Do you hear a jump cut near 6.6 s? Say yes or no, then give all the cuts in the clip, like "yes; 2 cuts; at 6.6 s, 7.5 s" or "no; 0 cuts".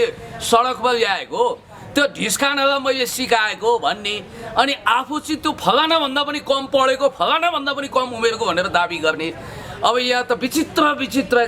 no; 0 cuts